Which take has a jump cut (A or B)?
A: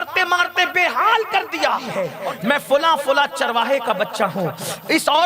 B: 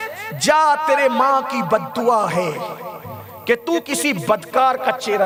A